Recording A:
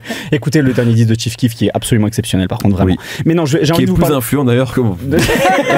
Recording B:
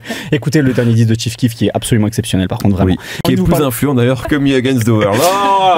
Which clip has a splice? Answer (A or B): B